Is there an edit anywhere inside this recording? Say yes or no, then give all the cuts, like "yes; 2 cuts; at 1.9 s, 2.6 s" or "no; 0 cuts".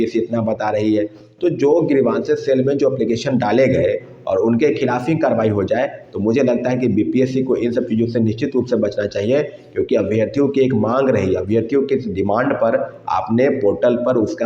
no; 0 cuts